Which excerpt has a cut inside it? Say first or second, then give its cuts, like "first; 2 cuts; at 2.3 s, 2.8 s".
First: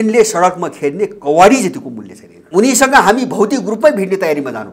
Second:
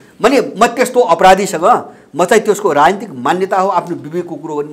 first; 1 cut; at 2.3 s